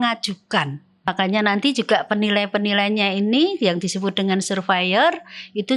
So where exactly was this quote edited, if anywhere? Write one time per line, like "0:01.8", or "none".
0:00.9